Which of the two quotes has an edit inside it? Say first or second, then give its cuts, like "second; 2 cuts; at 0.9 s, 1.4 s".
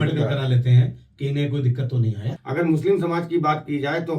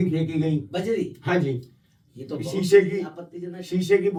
first; 1 cut; at 2.3 s